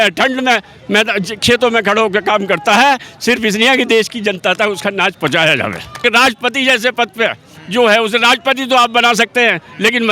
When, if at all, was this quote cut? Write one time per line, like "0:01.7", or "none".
0:06.4

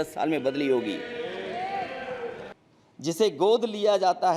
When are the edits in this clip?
0:02.6

